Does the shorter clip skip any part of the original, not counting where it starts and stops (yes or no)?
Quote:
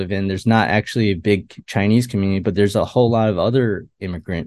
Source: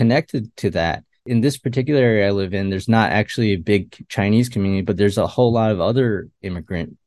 no